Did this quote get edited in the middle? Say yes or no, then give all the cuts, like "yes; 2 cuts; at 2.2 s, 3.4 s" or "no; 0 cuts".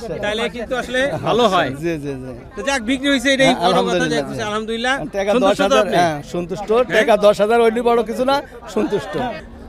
no; 0 cuts